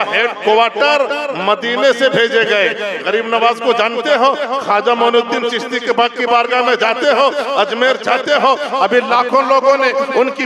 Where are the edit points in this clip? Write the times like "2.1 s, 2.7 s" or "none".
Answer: none

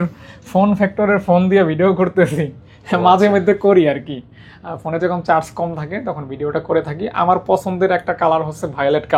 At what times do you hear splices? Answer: none

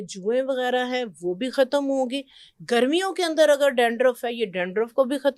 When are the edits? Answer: none

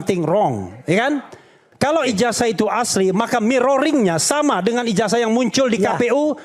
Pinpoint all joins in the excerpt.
1.6 s

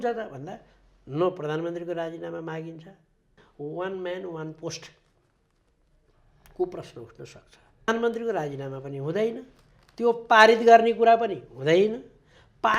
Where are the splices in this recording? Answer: 3.4 s, 7.9 s

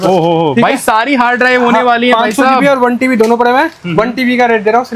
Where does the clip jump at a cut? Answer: none

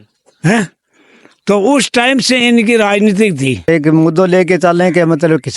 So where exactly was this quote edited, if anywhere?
3.7 s

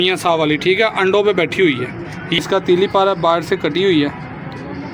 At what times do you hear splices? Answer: 2.4 s

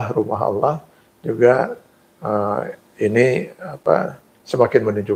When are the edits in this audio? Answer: none

